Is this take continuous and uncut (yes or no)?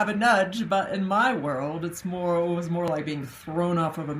yes